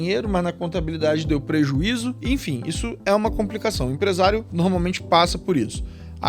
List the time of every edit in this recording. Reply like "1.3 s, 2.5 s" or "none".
2.2 s, 4.5 s